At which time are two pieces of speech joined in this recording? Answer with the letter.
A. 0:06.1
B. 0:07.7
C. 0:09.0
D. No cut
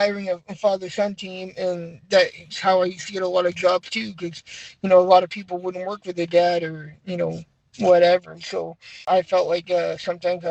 C